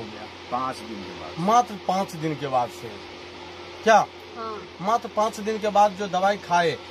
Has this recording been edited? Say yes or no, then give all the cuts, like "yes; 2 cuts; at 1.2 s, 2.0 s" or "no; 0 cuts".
no; 0 cuts